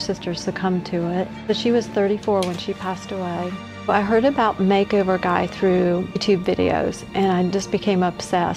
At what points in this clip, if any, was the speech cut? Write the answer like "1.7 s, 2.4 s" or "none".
3.7 s, 6.2 s

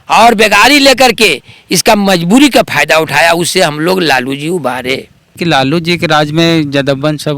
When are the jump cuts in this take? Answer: 5.4 s

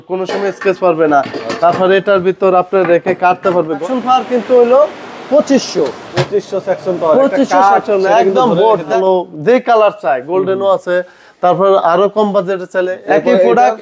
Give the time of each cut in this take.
3.8 s, 9.0 s, 13.0 s

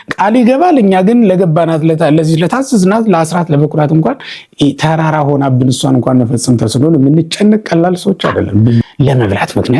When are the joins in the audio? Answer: 8.9 s

